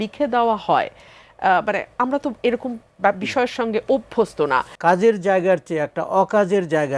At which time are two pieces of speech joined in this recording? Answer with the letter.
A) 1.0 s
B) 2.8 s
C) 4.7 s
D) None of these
C